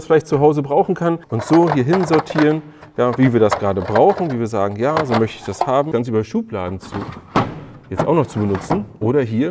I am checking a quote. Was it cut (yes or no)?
yes